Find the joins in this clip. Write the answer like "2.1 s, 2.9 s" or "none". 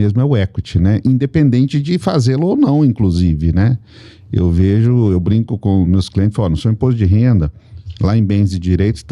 none